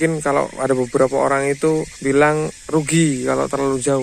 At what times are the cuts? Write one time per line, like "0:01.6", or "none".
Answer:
0:01.9